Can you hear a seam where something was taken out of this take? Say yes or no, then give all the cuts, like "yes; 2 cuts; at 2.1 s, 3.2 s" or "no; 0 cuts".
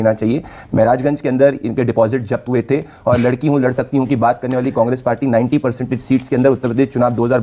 no; 0 cuts